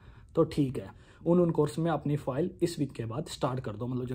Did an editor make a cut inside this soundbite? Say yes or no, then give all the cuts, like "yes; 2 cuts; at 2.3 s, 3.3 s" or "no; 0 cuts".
yes; 1 cut; at 1.1 s